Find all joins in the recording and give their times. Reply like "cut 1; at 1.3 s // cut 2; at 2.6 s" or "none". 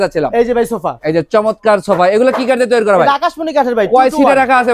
none